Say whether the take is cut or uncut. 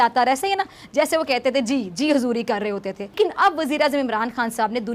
cut